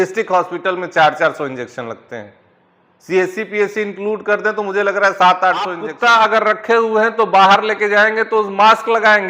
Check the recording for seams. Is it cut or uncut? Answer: cut